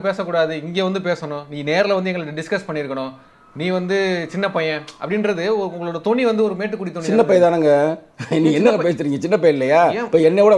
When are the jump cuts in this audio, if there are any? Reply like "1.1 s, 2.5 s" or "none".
none

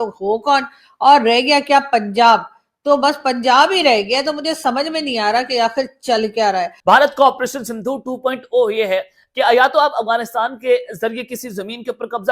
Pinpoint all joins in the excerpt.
6.7 s

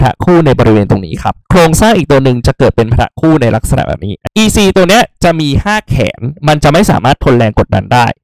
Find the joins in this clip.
1.4 s, 4.2 s

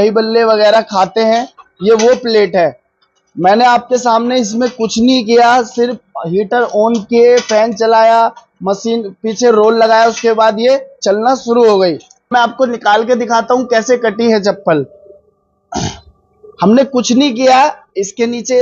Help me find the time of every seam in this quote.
12.3 s

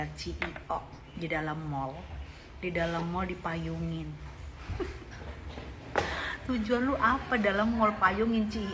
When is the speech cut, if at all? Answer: none

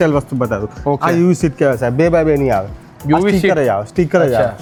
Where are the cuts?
none

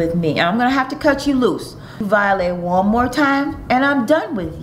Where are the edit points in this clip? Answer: 2.0 s

